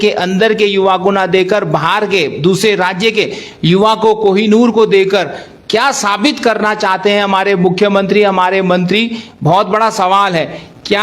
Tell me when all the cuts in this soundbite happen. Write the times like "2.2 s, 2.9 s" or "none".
none